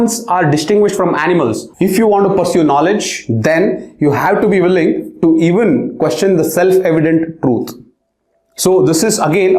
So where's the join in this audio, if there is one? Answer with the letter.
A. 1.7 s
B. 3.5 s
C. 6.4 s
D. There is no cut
A